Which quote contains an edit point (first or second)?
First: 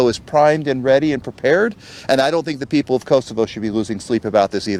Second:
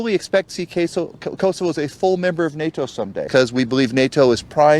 second